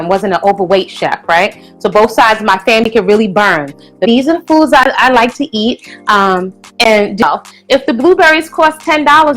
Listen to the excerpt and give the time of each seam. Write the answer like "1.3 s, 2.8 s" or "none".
4.0 s, 7.2 s